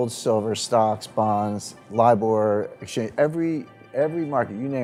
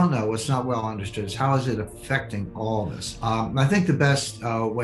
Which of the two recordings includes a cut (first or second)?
second